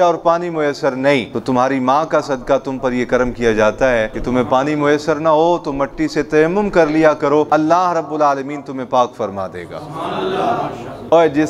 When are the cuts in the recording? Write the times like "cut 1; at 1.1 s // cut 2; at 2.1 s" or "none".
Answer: cut 1; at 4.2 s // cut 2; at 7.5 s